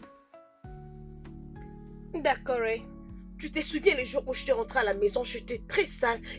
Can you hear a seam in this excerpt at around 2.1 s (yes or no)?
yes